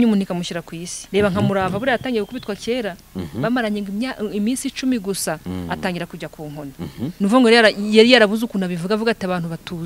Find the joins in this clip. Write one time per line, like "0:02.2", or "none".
0:01.0
0:07.1

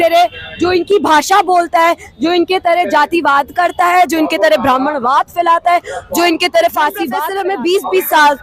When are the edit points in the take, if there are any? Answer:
0:07.3

